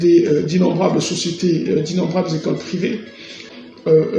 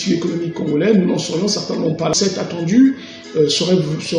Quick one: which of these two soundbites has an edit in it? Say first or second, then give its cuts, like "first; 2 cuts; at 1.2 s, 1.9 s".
second; 1 cut; at 2.2 s